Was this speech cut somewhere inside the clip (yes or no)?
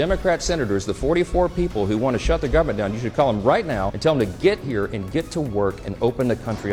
no